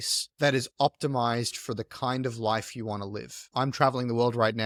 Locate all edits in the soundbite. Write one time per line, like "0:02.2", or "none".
none